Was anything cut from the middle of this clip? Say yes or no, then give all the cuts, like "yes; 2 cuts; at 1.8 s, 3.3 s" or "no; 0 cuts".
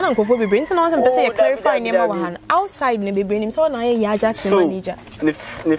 no; 0 cuts